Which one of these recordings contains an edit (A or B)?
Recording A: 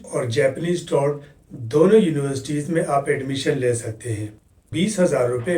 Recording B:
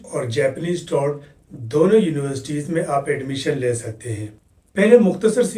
A